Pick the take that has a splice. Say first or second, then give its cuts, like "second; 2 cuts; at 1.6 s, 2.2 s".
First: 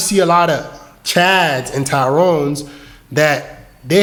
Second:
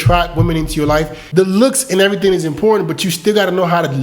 second; 1 cut; at 1.2 s